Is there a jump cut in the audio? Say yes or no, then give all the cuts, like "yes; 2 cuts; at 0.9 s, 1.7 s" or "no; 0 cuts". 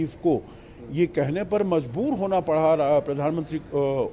no; 0 cuts